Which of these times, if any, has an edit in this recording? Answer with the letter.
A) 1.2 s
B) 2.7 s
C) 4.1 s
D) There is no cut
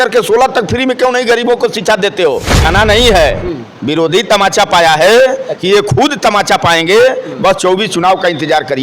B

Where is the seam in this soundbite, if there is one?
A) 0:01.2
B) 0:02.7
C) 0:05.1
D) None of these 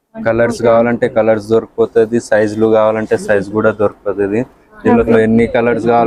C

